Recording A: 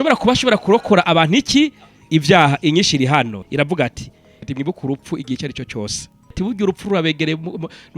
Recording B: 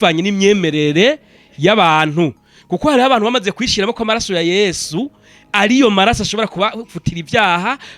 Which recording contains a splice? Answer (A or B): A